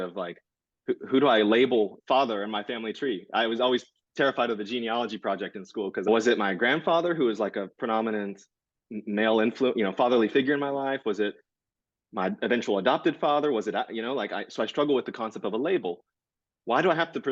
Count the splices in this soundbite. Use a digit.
1